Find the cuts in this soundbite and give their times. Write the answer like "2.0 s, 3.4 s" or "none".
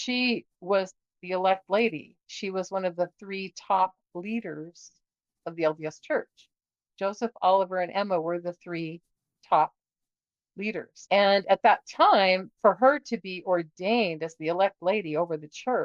10.9 s